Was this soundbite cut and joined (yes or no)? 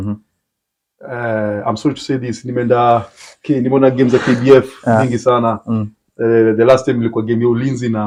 no